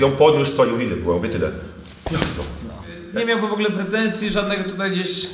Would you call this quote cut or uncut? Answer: cut